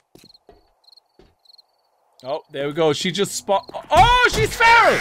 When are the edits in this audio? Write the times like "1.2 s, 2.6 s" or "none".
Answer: none